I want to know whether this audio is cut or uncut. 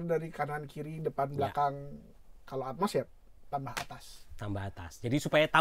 uncut